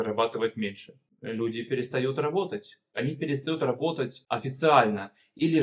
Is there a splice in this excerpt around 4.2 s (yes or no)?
yes